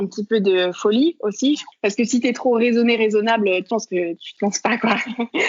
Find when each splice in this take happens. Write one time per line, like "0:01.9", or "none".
0:01.7
0:03.8